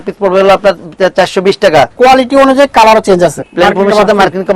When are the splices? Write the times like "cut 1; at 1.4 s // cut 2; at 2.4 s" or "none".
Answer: cut 1; at 1.9 s // cut 2; at 3.4 s